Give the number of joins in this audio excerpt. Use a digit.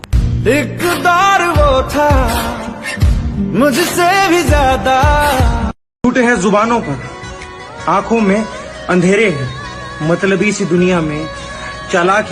1